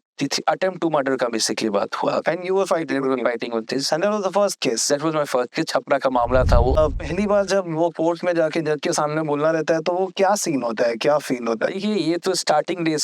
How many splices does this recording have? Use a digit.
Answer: 1